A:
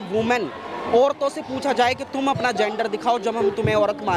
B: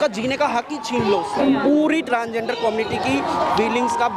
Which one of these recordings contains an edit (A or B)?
B